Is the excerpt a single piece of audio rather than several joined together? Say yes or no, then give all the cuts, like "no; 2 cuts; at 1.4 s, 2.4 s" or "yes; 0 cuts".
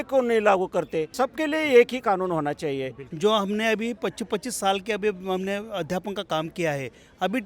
no; 2 cuts; at 1.1 s, 3.0 s